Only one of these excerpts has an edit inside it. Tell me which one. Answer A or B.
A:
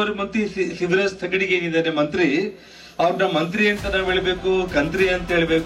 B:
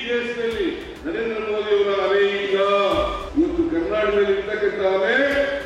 B